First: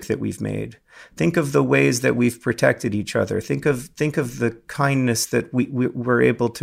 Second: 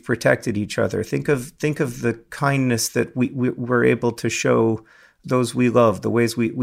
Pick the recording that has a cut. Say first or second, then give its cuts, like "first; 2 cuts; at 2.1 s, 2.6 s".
second; 1 cut; at 5.2 s